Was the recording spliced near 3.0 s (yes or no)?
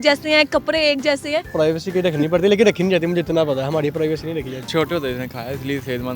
no